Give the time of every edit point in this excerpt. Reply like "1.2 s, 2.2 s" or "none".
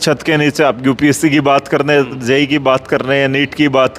none